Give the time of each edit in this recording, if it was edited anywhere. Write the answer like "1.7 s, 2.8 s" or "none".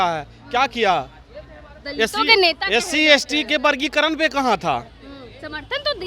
none